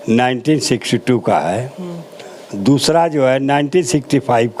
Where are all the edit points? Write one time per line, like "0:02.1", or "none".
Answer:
none